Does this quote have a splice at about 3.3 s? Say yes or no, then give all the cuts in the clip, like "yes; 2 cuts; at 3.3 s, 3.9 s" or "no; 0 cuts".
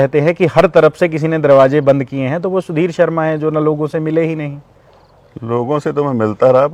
no; 0 cuts